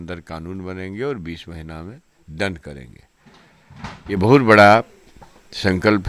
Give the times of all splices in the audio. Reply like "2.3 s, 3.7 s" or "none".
none